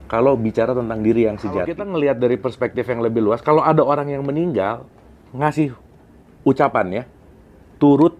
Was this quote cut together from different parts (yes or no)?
yes